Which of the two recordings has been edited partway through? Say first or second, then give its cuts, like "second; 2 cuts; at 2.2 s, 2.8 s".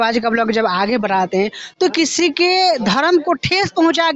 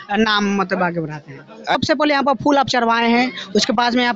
second; 1 cut; at 1.7 s